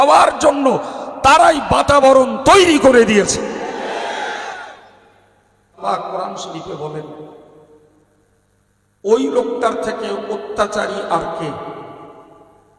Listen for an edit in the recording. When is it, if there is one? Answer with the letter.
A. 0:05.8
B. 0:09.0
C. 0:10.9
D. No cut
A